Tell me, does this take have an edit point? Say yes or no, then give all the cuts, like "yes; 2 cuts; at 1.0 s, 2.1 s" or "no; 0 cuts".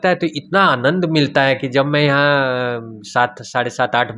no; 0 cuts